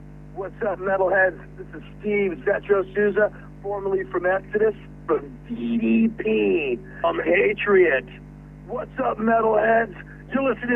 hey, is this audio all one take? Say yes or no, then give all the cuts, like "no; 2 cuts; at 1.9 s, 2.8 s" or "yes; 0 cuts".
no; 2 cuts; at 5.0 s, 7.0 s